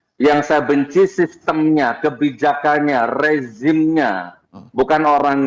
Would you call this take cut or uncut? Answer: uncut